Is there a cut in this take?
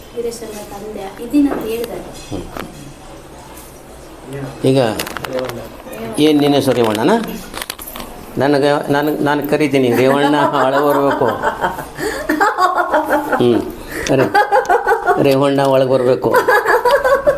no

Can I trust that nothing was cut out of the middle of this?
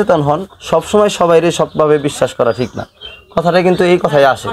yes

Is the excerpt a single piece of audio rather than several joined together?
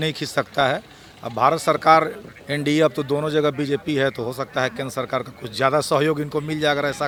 yes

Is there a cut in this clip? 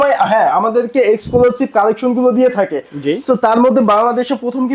no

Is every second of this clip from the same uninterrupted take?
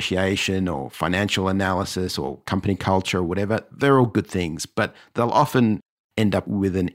yes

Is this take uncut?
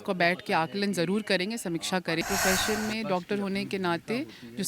no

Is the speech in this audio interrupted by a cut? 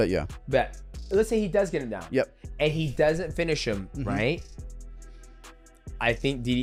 no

